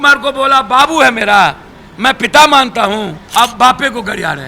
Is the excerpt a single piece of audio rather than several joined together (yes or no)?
no